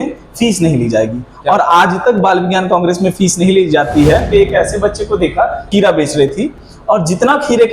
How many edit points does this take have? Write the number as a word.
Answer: two